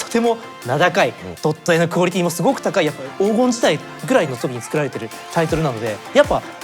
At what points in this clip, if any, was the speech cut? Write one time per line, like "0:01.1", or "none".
0:01.2
0:03.0